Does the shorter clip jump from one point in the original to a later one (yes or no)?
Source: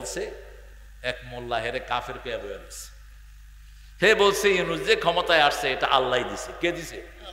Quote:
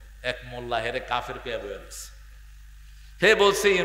no